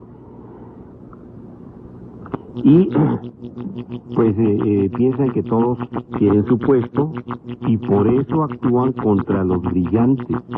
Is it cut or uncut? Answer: uncut